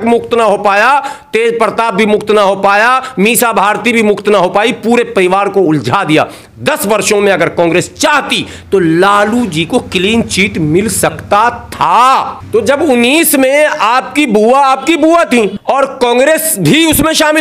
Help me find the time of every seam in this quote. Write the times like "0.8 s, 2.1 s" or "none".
12.4 s, 15.6 s